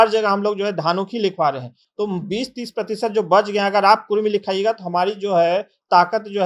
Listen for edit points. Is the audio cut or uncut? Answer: uncut